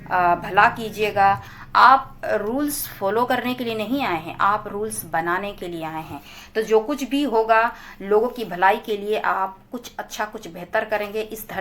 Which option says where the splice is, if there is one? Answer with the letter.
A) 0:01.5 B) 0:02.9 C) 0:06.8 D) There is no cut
A